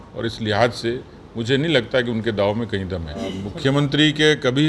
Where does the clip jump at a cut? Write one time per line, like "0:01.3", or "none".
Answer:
0:03.5